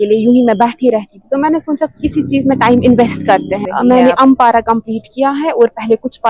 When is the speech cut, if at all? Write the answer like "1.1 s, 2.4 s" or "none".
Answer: 3.6 s